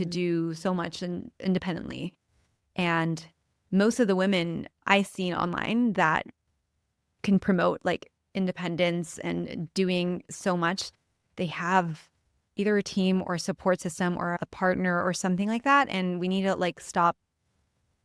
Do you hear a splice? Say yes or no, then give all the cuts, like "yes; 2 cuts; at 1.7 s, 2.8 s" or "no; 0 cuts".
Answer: yes; 2 cuts; at 4.8 s, 14.4 s